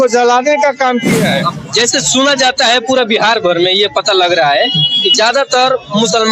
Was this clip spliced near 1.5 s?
yes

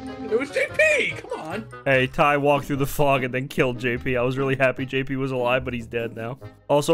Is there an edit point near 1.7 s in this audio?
no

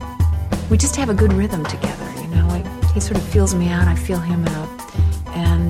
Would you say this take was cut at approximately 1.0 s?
no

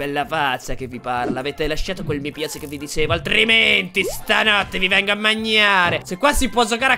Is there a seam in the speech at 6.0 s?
yes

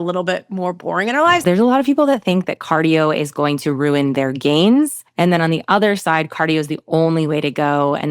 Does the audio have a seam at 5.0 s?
yes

